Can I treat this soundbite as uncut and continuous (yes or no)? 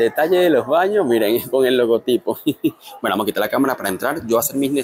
yes